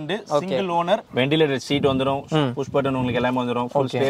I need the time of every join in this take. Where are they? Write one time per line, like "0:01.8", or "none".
0:01.1